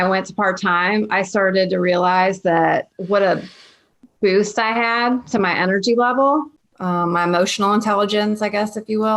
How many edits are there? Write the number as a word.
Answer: two